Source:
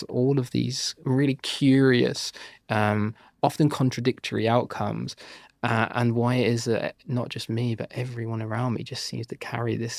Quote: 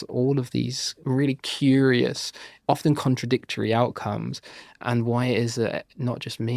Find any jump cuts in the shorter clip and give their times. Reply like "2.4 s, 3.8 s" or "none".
2.5 s, 4.8 s